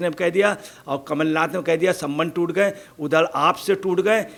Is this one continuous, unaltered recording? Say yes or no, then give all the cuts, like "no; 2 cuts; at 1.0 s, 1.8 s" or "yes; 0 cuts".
yes; 0 cuts